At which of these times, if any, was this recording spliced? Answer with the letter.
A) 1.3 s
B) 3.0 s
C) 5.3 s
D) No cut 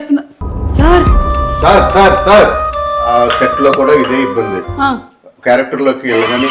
B